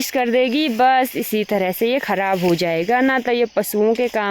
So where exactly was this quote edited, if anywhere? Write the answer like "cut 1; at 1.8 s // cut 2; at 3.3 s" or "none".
none